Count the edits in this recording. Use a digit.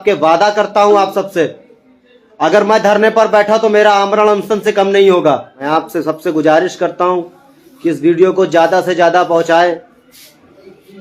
1